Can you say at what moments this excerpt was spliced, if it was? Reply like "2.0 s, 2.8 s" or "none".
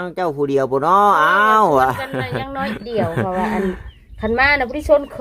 none